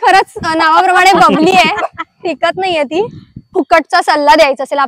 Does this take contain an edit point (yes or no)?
yes